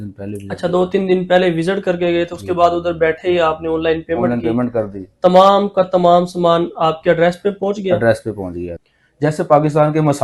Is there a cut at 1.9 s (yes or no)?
no